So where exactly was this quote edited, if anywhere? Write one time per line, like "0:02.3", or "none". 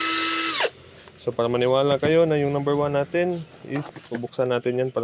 0:03.8